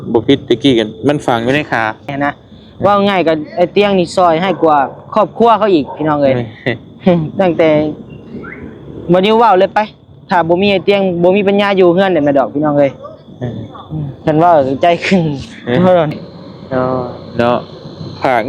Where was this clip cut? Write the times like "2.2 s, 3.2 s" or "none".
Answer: 2.1 s, 16.1 s